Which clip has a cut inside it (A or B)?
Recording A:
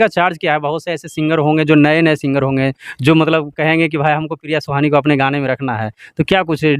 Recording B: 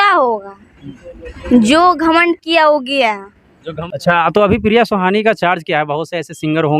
B